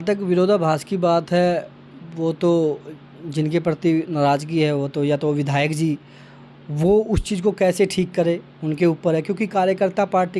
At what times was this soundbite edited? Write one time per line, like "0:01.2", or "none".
none